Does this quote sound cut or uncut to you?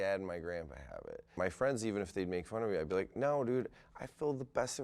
cut